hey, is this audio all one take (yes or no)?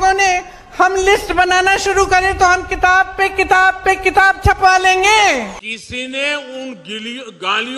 no